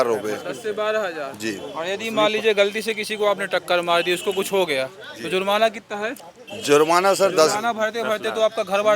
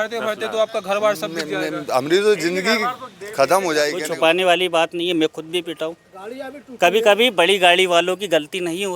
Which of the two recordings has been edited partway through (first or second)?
second